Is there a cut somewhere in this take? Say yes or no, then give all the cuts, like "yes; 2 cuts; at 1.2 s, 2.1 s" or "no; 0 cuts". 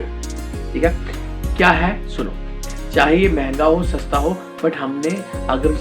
yes; 1 cut; at 2.6 s